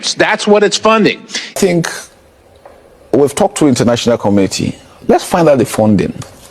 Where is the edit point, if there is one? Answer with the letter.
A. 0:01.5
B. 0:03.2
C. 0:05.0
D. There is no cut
A